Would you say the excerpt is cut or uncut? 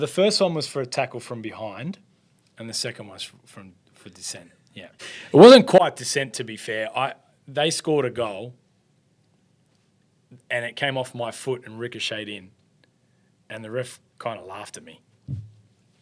uncut